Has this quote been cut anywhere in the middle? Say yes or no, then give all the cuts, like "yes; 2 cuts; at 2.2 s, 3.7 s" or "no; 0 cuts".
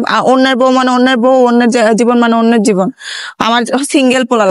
no; 0 cuts